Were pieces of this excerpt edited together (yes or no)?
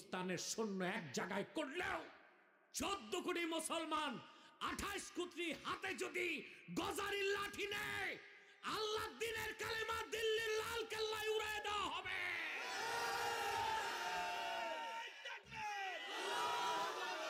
no